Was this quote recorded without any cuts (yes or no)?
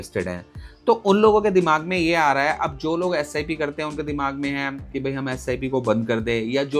yes